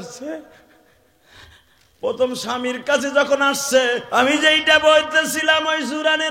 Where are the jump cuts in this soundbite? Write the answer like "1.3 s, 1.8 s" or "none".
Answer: 4.0 s